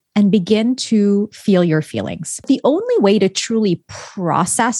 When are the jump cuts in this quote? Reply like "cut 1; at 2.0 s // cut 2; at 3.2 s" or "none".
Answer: cut 1; at 2.4 s